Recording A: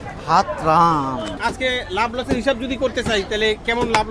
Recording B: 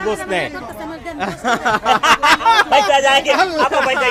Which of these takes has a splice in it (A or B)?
A